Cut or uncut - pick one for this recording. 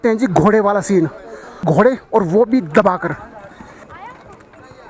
cut